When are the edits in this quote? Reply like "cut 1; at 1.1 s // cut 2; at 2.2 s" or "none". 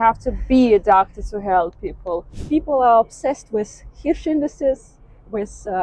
cut 1; at 2.4 s